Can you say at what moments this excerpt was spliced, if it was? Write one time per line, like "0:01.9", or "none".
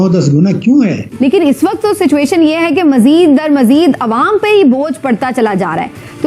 0:01.0

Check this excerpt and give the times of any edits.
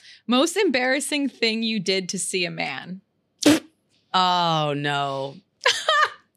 0:03.9
0:05.4

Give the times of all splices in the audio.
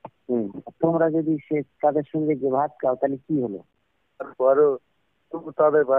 0:04.3

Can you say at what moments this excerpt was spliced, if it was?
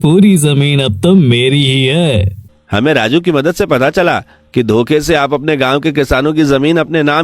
0:02.5

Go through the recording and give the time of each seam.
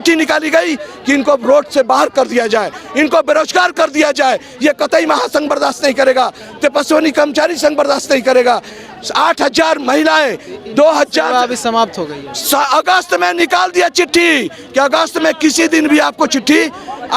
none

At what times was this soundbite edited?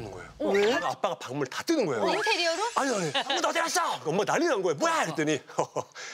0:00.9
0:02.1
0:03.4

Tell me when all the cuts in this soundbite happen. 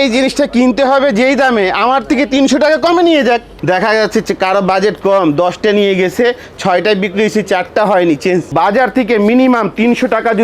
0:03.5
0:08.5

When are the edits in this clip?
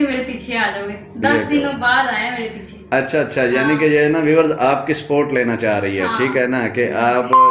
none

